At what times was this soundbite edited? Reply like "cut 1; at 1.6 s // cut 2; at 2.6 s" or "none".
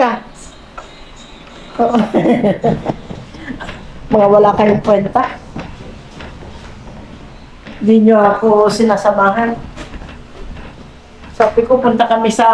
none